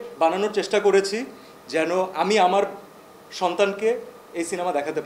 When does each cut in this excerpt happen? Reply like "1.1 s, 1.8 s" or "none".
none

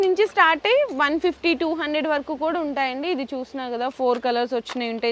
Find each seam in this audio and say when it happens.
none

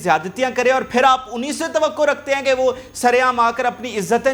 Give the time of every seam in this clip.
none

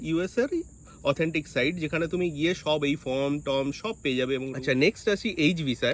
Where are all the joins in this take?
4.5 s

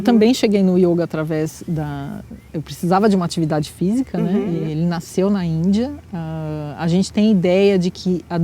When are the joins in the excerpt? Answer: 4.6 s

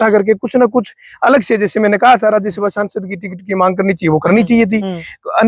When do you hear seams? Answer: none

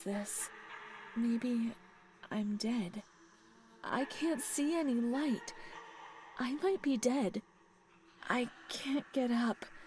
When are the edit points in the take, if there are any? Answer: none

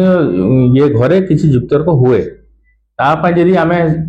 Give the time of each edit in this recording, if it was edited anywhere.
none

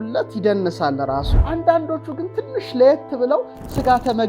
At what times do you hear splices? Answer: 1.3 s

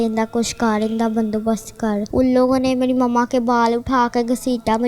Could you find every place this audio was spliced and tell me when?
2.1 s

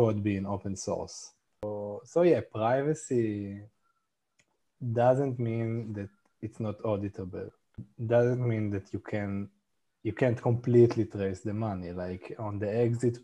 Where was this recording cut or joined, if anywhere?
1.6 s, 7.9 s

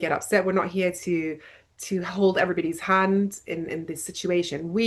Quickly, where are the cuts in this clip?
none

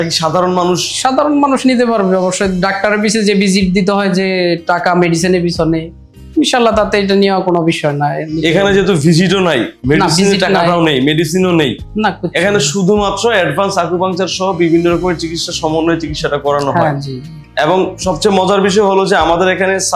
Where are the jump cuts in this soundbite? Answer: none

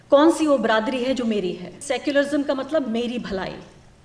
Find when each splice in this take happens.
1.8 s

